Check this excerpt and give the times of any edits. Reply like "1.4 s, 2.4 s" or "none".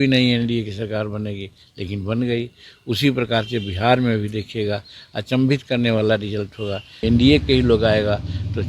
7.0 s